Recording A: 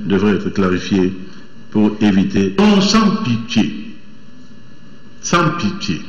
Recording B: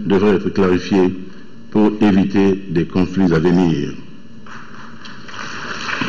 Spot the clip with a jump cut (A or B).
A